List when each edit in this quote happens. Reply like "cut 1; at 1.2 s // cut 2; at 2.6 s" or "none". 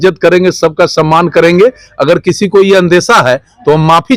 none